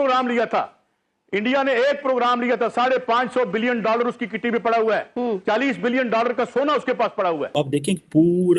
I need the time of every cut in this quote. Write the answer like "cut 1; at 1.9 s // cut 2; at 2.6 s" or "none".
cut 1; at 7.5 s